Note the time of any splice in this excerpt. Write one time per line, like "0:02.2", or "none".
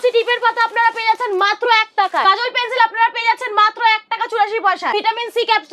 0:02.2
0:04.9